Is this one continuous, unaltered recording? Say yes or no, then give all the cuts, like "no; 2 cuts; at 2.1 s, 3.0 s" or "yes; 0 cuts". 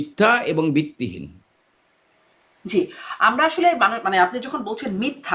yes; 0 cuts